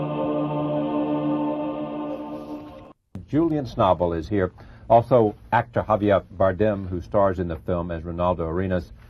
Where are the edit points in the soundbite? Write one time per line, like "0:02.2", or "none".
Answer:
none